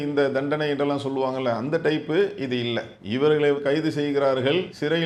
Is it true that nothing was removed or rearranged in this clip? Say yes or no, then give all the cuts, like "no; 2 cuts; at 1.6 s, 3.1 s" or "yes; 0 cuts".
yes; 0 cuts